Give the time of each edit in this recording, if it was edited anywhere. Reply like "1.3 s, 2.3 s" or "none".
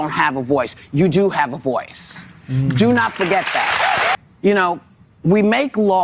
4.1 s